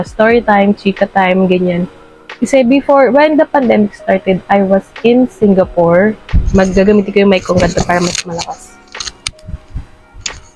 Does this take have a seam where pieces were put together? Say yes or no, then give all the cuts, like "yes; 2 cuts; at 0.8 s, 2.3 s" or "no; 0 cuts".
no; 0 cuts